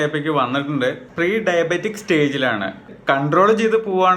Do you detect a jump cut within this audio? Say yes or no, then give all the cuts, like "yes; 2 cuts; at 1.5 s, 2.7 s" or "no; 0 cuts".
yes; 2 cuts; at 1.1 s, 2.9 s